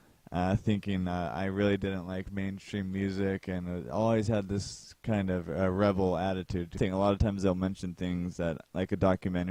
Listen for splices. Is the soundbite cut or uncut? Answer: uncut